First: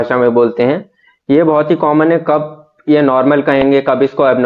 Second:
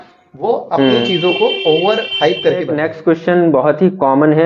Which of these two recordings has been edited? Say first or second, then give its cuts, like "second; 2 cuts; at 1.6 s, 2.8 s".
second; 1 cut; at 2.7 s